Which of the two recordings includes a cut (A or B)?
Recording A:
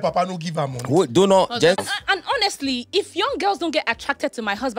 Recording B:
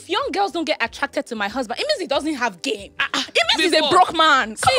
A